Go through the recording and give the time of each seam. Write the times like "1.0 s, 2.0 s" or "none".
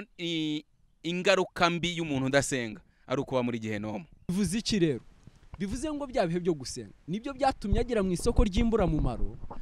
4.3 s